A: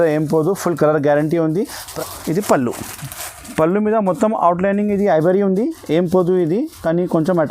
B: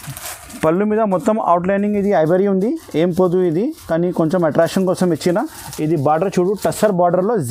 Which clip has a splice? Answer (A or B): A